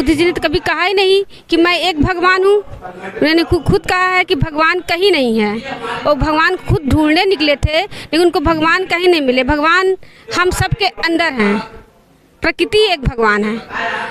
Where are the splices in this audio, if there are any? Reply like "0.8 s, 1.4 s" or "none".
none